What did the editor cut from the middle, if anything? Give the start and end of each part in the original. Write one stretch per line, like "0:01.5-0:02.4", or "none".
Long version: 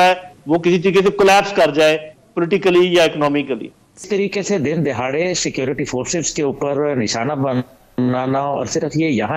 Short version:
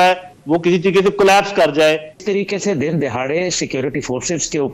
0:02.1-0:04.0